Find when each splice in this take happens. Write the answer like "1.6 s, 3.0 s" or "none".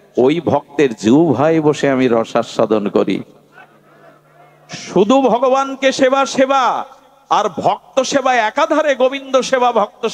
none